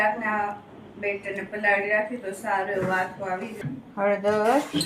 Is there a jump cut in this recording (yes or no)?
yes